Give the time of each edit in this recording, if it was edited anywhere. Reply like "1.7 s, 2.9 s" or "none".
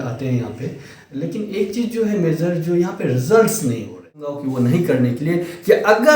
4.2 s